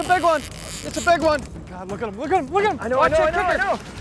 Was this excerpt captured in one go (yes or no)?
no